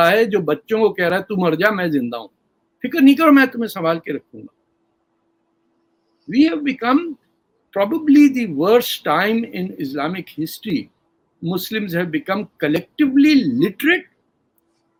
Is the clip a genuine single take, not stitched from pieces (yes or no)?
yes